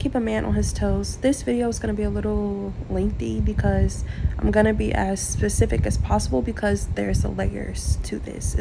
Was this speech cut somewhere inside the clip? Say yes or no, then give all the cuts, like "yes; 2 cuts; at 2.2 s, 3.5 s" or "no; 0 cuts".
no; 0 cuts